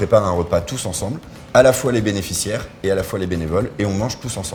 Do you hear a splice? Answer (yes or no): no